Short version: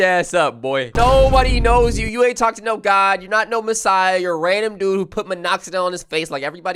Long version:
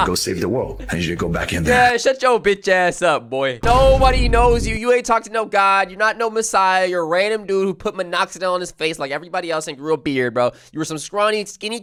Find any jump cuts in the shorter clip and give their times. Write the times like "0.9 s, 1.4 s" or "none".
none